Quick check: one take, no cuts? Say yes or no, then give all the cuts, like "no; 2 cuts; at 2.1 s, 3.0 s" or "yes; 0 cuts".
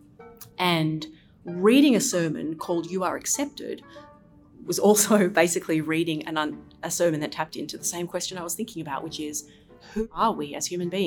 no; 1 cut; at 10.0 s